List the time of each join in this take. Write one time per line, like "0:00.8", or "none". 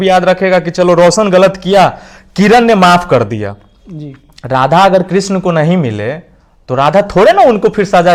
none